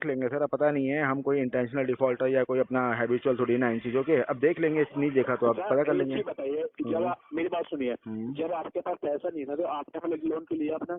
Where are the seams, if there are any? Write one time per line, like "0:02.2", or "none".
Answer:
none